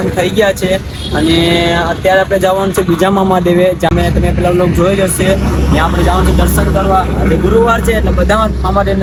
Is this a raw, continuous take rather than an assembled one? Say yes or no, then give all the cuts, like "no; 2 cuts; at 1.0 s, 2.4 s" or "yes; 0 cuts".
yes; 0 cuts